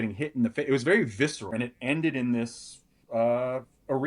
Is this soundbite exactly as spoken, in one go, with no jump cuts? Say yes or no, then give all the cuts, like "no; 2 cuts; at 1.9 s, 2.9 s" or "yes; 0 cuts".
no; 1 cut; at 1.5 s